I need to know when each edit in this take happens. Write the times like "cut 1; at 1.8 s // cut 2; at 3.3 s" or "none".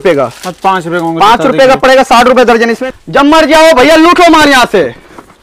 cut 1; at 2.8 s